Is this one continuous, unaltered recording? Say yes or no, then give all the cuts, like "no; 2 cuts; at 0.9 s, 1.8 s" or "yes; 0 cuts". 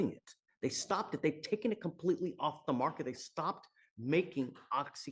yes; 0 cuts